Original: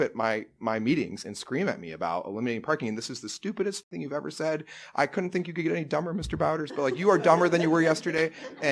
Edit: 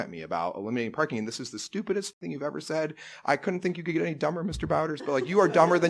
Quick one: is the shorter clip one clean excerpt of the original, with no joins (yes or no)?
yes